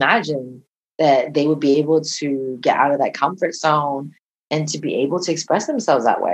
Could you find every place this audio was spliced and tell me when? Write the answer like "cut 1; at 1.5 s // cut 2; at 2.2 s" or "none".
none